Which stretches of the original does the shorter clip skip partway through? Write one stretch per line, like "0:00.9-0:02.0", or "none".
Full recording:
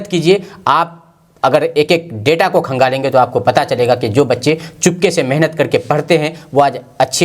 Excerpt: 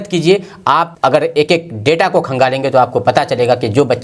0:00.9-0:01.3